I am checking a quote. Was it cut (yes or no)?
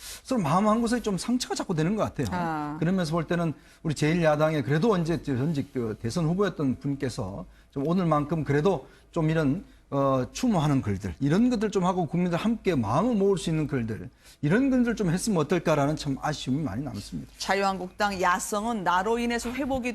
no